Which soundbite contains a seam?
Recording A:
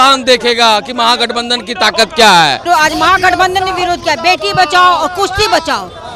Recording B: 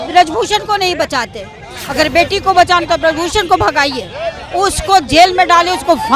A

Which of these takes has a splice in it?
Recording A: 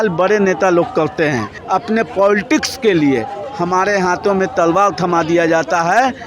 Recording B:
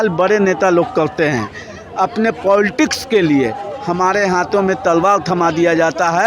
A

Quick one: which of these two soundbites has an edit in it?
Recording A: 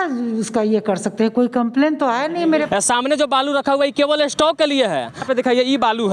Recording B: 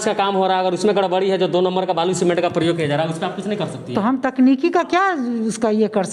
A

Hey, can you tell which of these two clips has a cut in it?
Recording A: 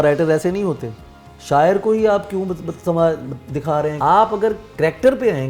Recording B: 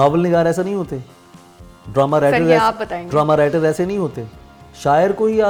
A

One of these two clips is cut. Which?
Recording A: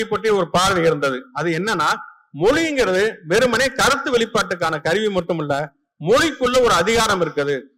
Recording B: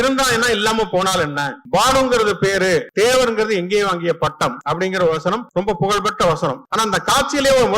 B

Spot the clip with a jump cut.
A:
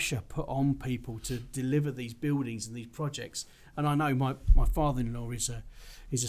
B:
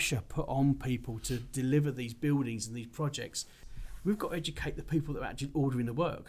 B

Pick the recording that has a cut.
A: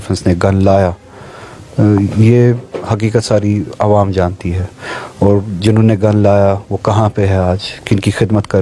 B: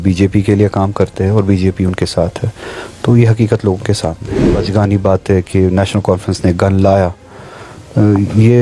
B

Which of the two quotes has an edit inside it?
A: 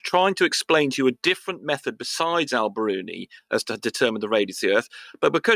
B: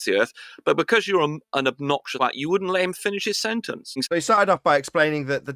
B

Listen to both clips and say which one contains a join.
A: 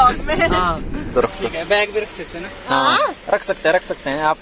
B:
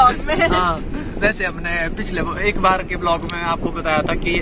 A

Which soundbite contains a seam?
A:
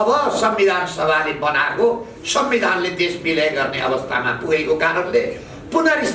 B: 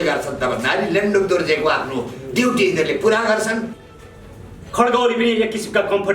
B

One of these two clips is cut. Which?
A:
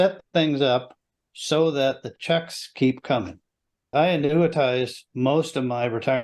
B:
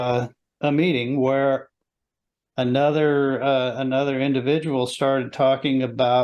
A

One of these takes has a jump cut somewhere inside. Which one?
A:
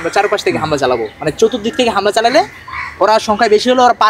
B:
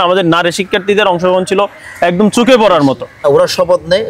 B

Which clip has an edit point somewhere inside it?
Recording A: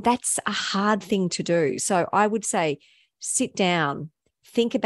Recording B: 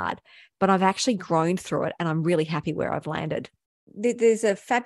B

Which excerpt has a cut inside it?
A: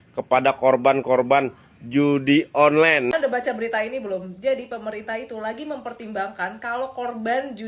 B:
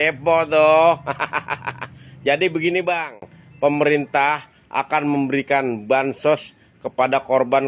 A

